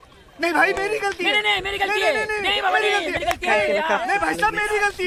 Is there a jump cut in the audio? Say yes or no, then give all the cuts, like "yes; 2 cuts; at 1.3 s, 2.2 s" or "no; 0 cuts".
no; 0 cuts